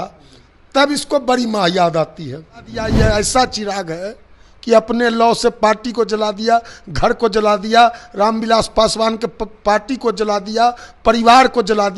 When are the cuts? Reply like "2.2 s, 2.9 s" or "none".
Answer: 2.9 s

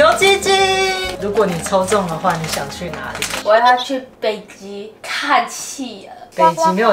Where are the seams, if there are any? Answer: 1.1 s, 3.3 s

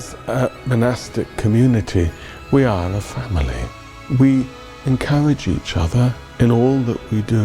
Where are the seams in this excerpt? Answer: 3.9 s

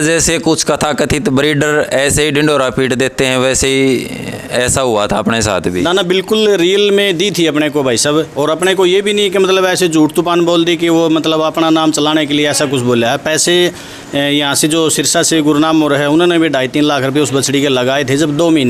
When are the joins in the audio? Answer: none

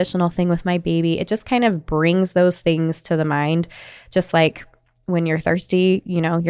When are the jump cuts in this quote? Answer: none

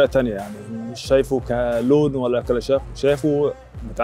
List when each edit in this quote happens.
1.4 s

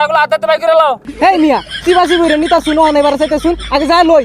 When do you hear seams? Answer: 1.1 s

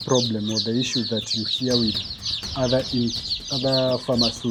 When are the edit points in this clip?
none

